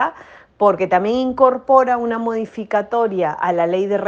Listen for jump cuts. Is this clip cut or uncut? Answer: uncut